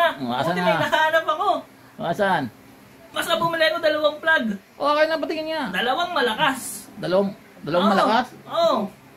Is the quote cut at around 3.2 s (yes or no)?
yes